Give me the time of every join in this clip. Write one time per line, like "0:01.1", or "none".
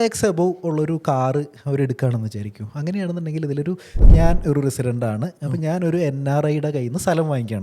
0:04.0